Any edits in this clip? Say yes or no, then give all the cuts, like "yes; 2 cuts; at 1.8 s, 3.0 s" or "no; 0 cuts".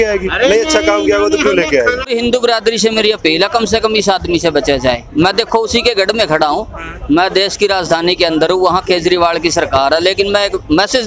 yes; 1 cut; at 2.1 s